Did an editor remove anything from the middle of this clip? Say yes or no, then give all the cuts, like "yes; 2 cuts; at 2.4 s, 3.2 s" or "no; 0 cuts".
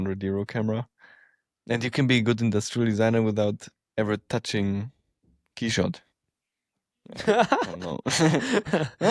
no; 0 cuts